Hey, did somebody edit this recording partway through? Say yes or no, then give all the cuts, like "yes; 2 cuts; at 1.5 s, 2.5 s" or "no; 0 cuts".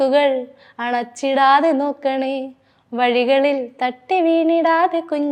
no; 0 cuts